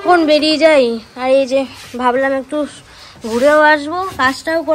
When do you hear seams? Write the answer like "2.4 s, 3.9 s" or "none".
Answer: none